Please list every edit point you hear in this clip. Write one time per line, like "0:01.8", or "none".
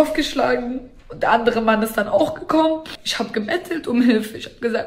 0:03.0